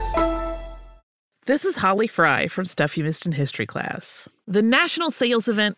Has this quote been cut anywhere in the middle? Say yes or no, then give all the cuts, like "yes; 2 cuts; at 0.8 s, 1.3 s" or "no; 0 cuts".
yes; 1 cut; at 1.1 s